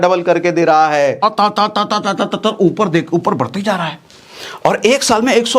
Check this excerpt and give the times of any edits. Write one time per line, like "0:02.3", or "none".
0:01.2